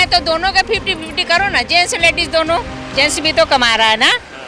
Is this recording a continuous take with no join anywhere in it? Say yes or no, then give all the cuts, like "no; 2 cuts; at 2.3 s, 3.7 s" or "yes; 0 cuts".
yes; 0 cuts